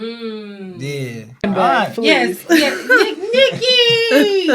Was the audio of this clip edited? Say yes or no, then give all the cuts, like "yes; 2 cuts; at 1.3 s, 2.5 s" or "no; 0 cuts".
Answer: yes; 1 cut; at 1.4 s